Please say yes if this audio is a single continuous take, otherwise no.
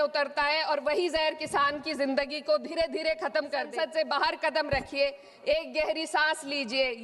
no